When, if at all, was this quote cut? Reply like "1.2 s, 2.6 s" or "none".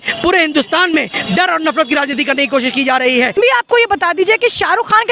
3.3 s